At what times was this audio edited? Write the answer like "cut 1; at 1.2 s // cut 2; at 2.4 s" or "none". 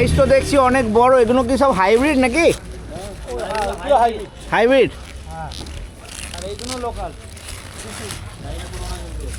none